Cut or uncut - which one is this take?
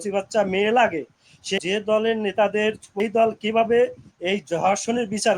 cut